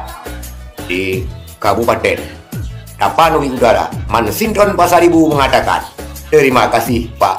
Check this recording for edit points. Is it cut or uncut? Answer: uncut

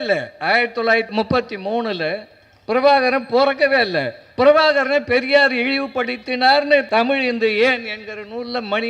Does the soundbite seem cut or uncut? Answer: cut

